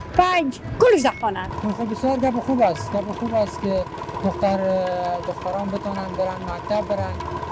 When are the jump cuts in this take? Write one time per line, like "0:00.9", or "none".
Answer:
0:01.5